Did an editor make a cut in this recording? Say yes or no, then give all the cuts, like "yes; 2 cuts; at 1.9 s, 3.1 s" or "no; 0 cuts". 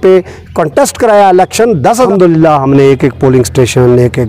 yes; 1 cut; at 2.1 s